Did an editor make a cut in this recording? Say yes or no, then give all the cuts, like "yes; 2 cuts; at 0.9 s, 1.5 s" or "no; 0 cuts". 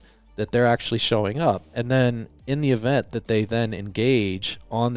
no; 0 cuts